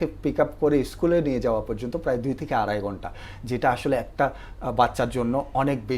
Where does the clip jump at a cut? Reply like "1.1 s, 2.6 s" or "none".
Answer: none